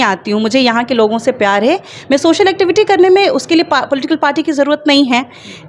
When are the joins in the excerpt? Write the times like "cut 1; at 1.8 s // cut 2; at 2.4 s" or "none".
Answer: none